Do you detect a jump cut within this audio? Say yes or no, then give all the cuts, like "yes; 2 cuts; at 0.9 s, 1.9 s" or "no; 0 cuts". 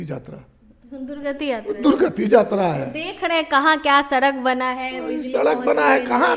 no; 0 cuts